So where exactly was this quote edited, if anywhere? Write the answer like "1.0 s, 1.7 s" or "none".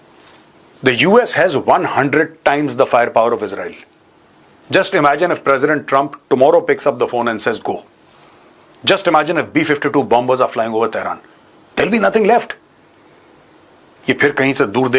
none